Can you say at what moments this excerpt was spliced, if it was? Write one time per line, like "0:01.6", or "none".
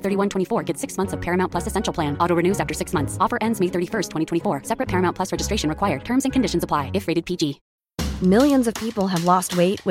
0:07.6